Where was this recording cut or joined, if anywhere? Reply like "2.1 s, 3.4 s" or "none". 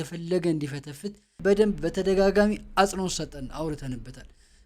1.3 s